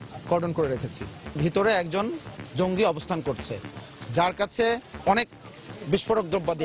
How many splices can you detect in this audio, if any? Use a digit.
2